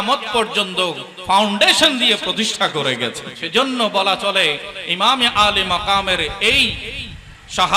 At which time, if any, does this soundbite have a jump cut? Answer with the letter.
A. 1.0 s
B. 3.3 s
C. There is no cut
B